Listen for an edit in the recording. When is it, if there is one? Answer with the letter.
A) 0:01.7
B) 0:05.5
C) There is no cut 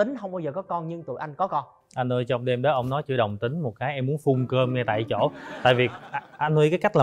C